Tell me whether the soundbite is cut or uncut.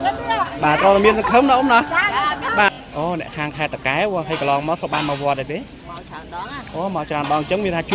cut